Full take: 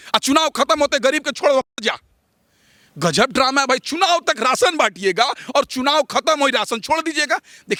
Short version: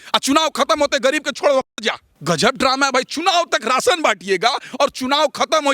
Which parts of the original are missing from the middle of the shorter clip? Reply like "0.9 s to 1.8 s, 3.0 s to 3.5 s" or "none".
2.1 s to 2.8 s